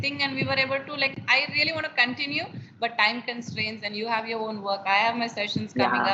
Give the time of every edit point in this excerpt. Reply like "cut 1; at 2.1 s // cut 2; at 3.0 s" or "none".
none